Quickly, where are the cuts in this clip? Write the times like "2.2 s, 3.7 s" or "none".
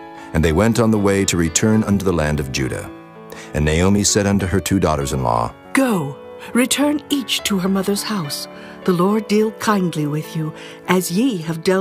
10.2 s

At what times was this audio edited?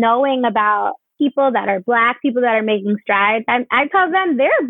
1.0 s

